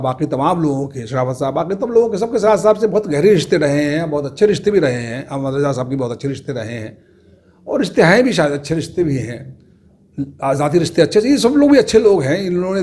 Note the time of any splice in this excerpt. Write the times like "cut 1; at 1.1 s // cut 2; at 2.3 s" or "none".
none

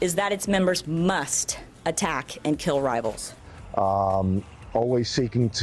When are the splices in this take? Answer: none

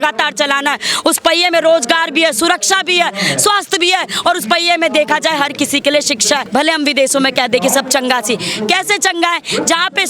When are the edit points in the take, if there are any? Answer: cut 1; at 6.4 s

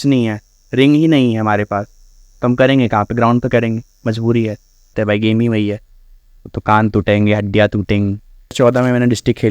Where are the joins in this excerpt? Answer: cut 1; at 4.9 s // cut 2; at 8.5 s

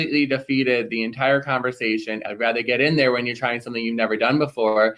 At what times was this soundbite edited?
cut 1; at 2.2 s

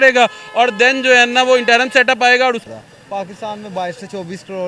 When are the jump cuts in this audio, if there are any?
cut 1; at 2.6 s

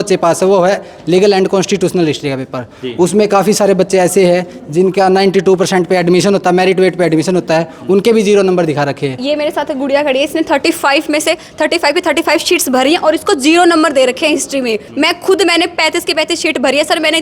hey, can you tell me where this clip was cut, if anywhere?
cut 1; at 9.2 s // cut 2; at 14.8 s

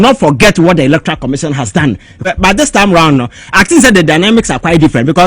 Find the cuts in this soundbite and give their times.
cut 1; at 2.2 s

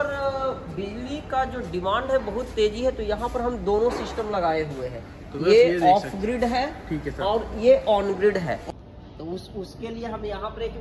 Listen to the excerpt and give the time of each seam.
cut 1; at 8.6 s

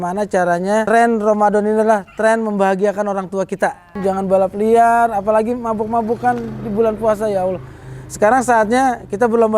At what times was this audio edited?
cut 1; at 0.9 s // cut 2; at 4.0 s

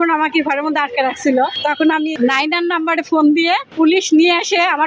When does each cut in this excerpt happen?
cut 1; at 2.0 s // cut 2; at 3.7 s

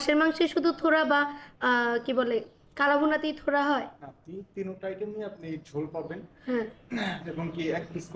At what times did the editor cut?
none

